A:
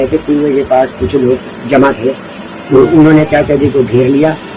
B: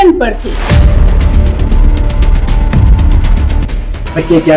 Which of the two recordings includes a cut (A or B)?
B